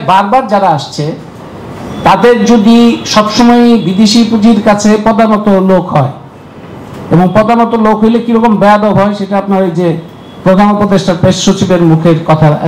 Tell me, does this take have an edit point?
no; 0 cuts

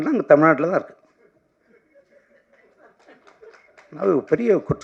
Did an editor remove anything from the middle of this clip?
no; 0 cuts

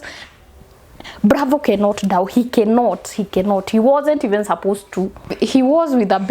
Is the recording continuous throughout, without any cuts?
no; 1 cut; at 5.3 s

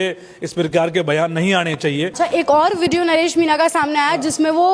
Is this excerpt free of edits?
no; 1 cut; at 2.1 s

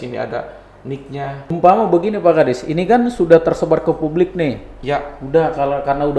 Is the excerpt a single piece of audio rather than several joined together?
no; 1 cut; at 1.6 s

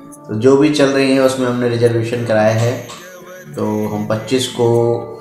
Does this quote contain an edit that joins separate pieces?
no; 0 cuts

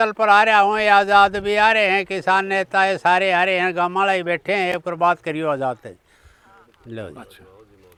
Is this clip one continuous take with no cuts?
yes; 0 cuts

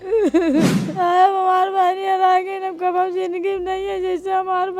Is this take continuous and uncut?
no; 1 cut; at 1.0 s

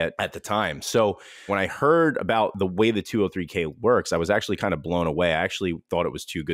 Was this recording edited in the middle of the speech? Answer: yes; 1 cut; at 1.5 s

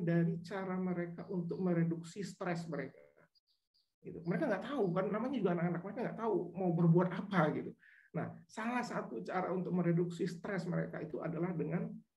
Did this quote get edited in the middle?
no; 0 cuts

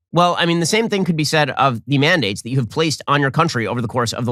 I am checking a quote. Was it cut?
no; 0 cuts

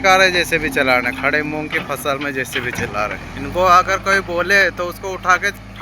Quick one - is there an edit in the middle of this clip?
yes; 1 cut; at 3.3 s

